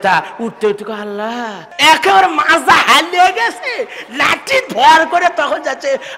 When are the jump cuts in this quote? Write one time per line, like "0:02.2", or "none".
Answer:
0:01.6